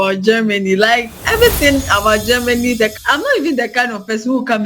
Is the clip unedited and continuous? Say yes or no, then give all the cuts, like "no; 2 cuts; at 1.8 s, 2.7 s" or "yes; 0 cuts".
no; 1 cut; at 2.9 s